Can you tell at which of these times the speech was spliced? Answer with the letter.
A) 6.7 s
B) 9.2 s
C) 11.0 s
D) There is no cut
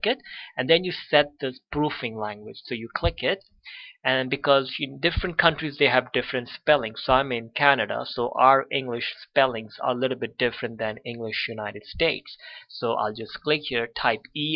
C